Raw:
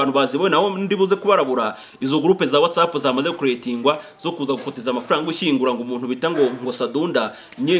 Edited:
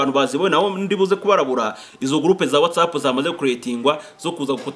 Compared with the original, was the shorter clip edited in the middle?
no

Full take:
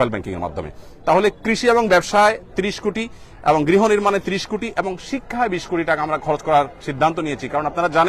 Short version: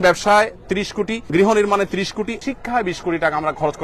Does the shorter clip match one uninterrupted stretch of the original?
no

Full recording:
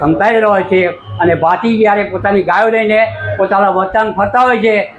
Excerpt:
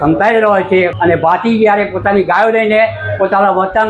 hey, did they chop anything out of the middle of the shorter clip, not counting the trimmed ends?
yes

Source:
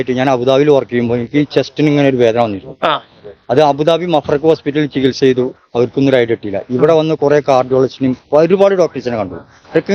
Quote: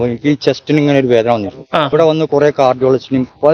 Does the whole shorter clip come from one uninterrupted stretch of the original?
no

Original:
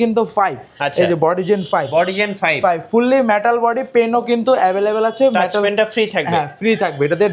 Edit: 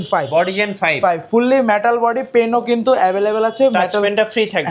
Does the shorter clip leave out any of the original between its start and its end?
no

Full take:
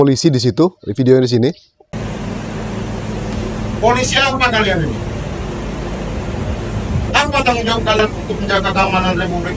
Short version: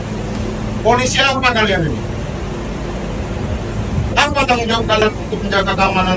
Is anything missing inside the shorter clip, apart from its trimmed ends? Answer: no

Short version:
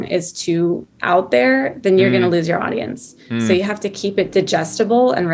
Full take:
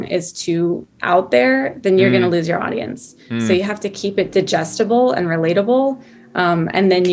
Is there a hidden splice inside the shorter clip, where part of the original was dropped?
no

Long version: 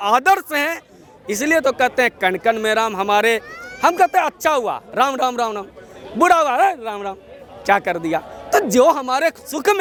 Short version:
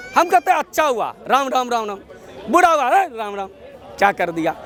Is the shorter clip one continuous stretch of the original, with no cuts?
yes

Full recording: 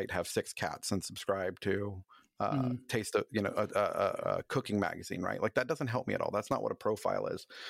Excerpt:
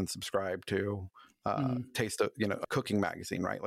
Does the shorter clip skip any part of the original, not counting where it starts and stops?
yes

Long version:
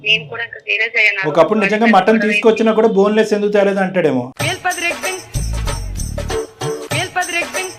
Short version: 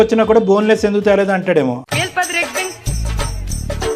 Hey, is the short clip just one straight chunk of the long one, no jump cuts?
yes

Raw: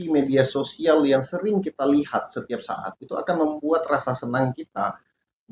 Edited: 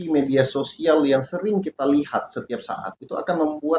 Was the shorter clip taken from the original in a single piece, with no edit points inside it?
yes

